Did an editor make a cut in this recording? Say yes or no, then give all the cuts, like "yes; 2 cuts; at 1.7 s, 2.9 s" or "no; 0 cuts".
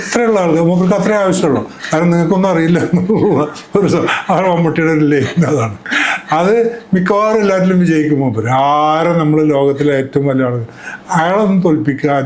no; 0 cuts